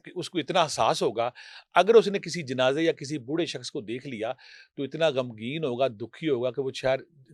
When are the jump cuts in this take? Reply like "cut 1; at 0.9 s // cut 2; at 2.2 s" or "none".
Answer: none